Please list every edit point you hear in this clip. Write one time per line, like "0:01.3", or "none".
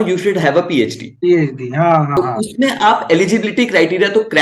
0:02.1